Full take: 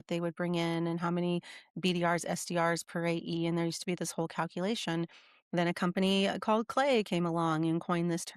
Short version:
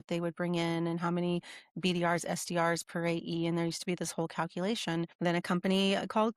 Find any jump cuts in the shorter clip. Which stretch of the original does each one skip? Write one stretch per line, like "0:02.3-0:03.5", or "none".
0:05.1-0:05.4

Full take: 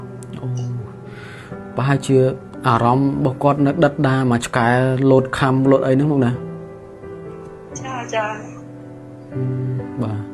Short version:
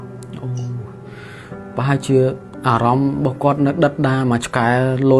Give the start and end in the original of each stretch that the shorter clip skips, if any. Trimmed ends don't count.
none

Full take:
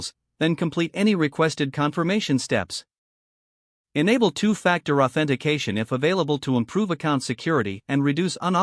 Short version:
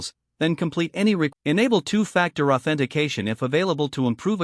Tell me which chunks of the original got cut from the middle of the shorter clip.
0:01.3-0:03.8

